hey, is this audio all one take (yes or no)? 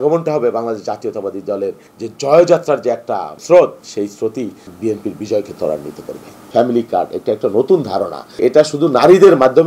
no